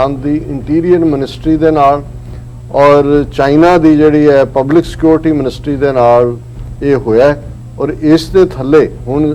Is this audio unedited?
yes; 0 cuts

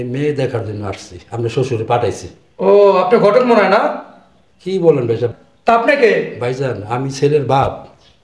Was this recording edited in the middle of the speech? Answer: no; 0 cuts

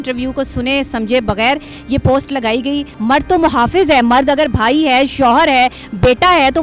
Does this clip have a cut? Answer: yes; 1 cut; at 2.9 s

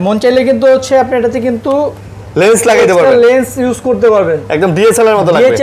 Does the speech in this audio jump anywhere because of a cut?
no; 0 cuts

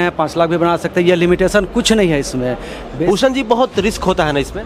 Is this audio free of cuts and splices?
no; 1 cut; at 2.8 s

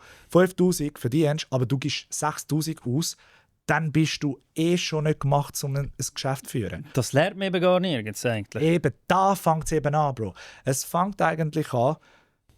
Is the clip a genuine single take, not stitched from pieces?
yes; 0 cuts

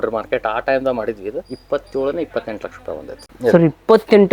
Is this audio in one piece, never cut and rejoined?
no; 1 cut; at 3.2 s

